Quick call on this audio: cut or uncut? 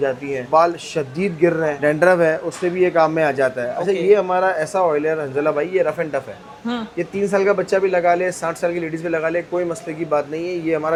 uncut